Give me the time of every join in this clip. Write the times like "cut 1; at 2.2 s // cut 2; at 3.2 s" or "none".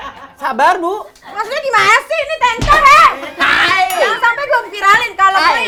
none